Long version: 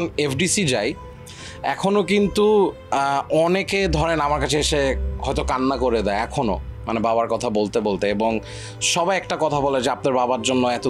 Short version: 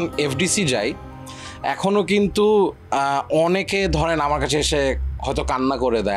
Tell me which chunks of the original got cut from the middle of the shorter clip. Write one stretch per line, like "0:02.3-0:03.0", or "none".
none

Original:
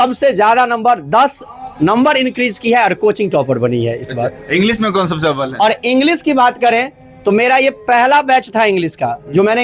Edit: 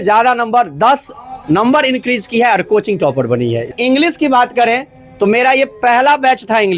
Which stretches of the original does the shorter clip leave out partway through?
0:04.1-0:05.8

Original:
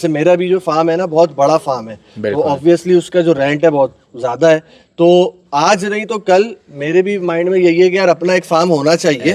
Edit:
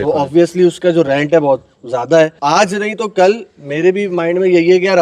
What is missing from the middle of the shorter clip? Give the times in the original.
0:04.7-0:05.5

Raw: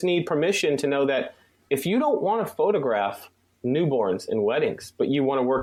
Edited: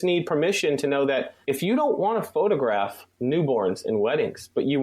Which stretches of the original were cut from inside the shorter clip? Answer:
0:01.4-0:01.6
0:03.3-0:03.5

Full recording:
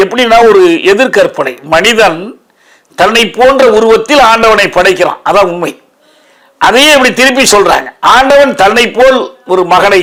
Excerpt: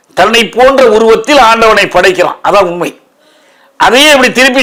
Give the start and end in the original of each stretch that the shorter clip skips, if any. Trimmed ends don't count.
none

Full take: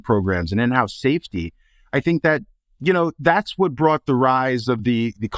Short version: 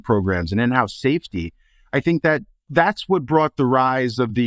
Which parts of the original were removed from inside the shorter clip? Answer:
0:02.7-0:03.2

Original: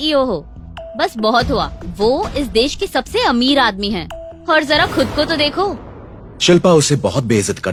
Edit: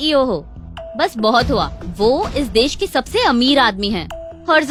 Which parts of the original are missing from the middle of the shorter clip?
none

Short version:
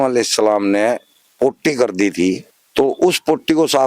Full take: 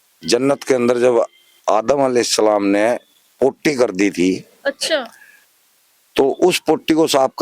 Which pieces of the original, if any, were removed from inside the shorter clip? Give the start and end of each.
0:04.5-0:05.9

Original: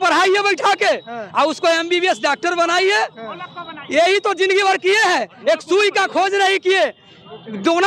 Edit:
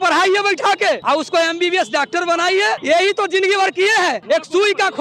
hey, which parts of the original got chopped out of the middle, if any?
0:01.0-0:01.3
0:03.1-0:03.9
0:05.3-0:05.4

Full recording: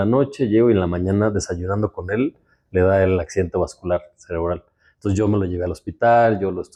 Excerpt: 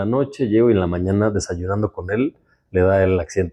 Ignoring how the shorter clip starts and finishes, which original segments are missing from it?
none

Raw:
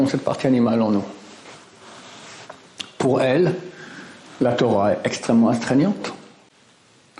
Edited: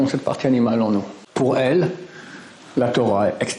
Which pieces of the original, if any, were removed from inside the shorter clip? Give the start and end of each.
0:01.2-0:02.8

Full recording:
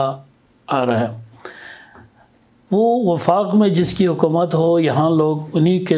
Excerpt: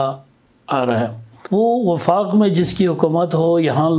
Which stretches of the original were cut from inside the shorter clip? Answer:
0:01.3-0:02.5

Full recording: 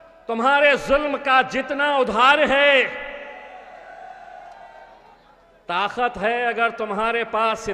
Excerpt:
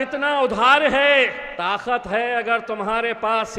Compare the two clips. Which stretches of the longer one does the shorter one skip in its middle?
0:03.0-0:05.6

